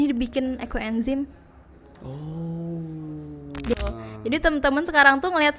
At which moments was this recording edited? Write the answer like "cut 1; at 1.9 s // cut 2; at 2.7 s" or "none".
cut 1; at 3.7 s

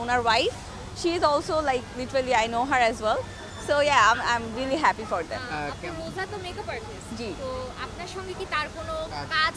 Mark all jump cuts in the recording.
none

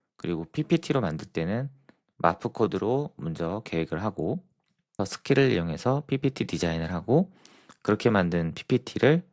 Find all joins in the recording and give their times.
cut 1; at 4.9 s

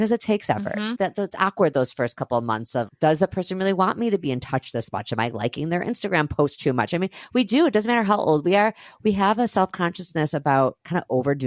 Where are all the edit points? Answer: cut 1; at 1.0 s // cut 2; at 2.9 s

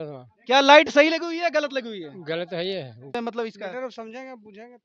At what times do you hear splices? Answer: cut 1; at 3.2 s

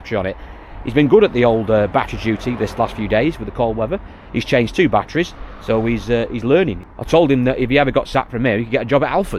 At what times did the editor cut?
none

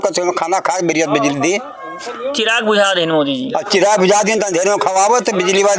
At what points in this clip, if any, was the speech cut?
none

